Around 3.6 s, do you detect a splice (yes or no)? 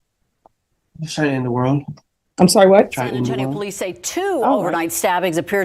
yes